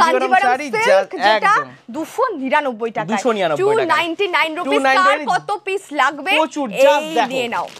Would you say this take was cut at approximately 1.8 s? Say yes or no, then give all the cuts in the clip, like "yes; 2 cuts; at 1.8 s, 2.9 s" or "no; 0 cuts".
no; 0 cuts